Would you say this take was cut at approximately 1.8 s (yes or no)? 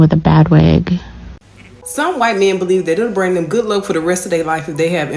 yes